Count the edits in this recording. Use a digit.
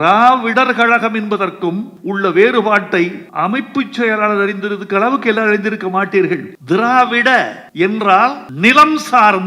5